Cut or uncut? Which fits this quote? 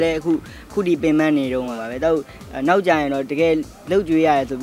cut